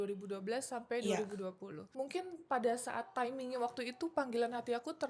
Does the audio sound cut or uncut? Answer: cut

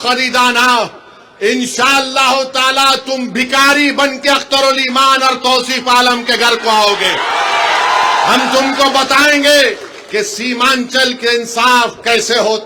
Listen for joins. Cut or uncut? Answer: uncut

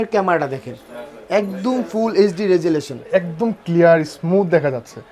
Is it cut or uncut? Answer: cut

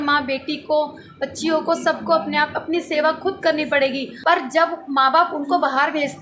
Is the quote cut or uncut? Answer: cut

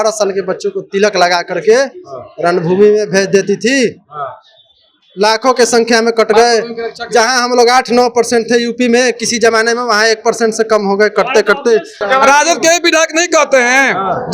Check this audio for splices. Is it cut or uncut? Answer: cut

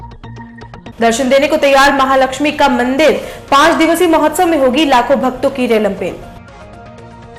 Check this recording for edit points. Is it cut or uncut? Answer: uncut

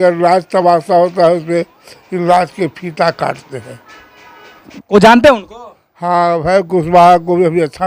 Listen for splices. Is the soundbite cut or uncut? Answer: cut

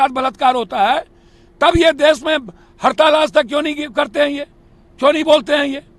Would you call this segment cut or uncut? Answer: uncut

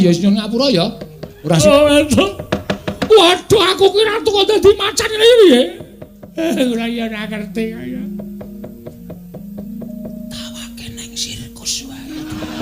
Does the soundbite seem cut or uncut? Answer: cut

